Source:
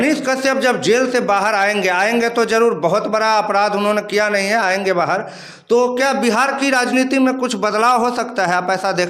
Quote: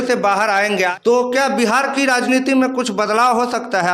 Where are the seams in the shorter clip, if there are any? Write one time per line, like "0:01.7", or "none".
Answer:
0:00.9